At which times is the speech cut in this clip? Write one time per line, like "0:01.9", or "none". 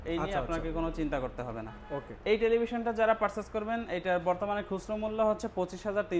none